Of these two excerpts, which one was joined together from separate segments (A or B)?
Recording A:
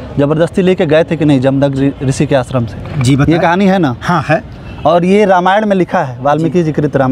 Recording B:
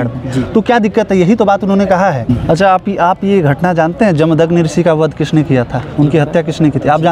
B